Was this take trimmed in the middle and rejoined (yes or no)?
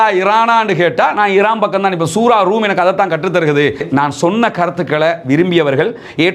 yes